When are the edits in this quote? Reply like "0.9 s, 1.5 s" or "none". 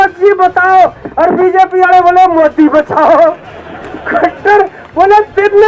none